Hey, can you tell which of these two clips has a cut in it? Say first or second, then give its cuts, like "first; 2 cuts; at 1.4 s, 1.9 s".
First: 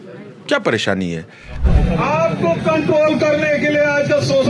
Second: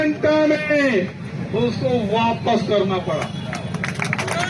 first; 1 cut; at 1.6 s